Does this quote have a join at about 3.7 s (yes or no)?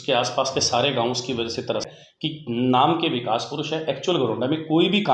no